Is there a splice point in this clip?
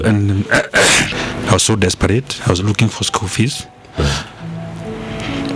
yes; 1 cut; at 1.1 s

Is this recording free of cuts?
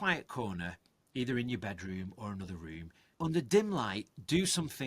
no; 1 cut; at 3.0 s

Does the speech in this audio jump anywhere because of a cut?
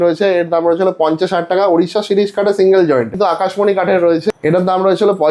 yes; 2 cuts; at 3.1 s, 4.3 s

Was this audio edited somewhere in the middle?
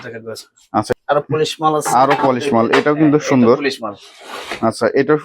yes; 1 cut; at 0.9 s

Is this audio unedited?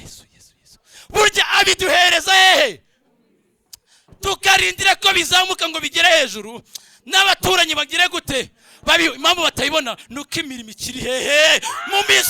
yes; 0 cuts

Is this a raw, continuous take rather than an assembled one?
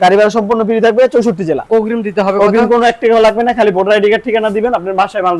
yes; 0 cuts

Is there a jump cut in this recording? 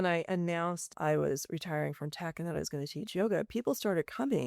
yes; 1 cut; at 0.9 s

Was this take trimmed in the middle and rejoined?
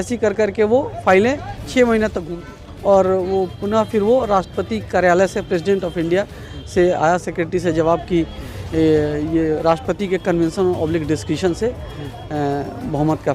yes; 1 cut; at 2.3 s

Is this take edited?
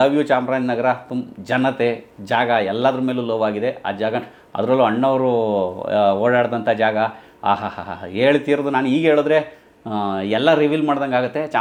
no; 0 cuts

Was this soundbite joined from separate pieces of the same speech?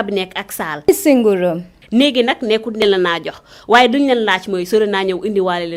no; 0 cuts

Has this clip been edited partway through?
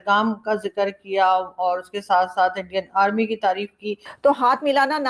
yes; 1 cut; at 4.1 s

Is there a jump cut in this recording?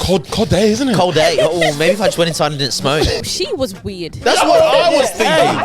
yes; 1 cut; at 3.2 s

